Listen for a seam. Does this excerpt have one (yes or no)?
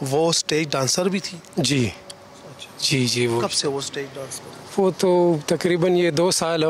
no